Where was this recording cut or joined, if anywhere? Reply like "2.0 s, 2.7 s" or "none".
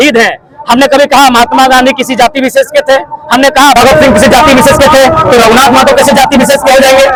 none